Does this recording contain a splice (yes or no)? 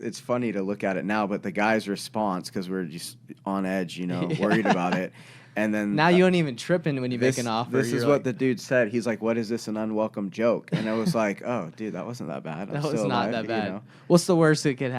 no